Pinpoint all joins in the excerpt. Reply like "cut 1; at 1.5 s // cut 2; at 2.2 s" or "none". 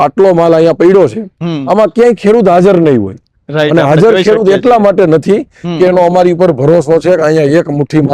none